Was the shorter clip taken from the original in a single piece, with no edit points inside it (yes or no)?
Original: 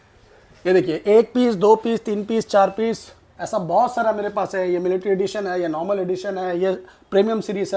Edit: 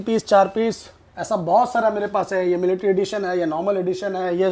yes